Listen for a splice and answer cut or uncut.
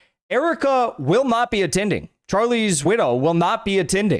cut